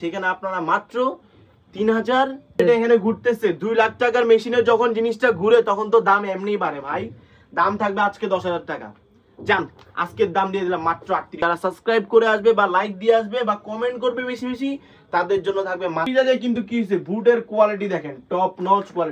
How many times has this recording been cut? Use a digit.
3